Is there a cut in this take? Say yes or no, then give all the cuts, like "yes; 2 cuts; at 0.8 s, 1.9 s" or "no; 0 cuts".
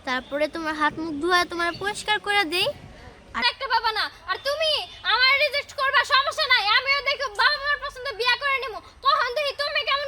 yes; 1 cut; at 3.4 s